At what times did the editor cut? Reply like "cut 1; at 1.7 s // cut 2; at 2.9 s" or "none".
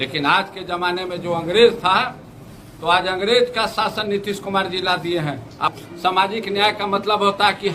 cut 1; at 5.7 s